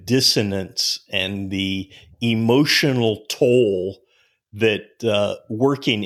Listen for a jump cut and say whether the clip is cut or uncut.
uncut